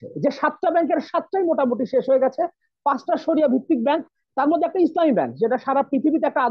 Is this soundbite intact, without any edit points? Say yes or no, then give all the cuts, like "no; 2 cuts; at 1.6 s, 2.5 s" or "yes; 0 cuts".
yes; 0 cuts